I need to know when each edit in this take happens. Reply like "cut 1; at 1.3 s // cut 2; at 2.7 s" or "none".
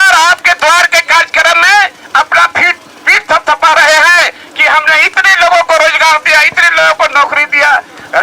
none